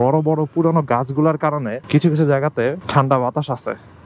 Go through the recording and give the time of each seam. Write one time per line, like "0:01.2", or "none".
0:01.8
0:02.8